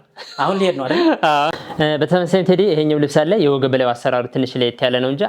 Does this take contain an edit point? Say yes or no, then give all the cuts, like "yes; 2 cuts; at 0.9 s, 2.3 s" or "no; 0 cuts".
yes; 1 cut; at 1.6 s